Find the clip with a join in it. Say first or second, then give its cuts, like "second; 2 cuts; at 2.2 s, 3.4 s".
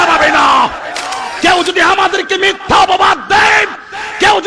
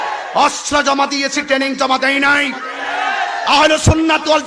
first; 1 cut; at 1.3 s